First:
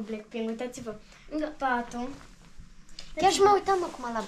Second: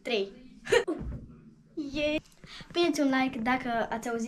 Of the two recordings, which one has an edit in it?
second; 1 cut; at 2.2 s

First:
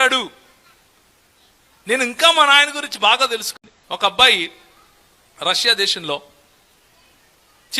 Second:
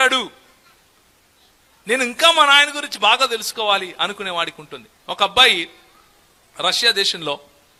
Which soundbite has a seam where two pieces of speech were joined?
first; 1 cut; at 3.5 s

